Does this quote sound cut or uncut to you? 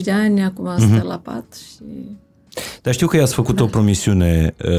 uncut